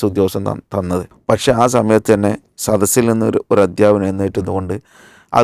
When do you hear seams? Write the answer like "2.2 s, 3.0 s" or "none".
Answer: 1.1 s